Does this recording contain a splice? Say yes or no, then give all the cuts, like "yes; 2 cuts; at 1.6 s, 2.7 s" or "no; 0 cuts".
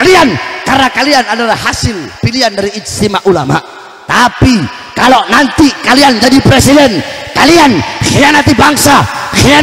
no; 0 cuts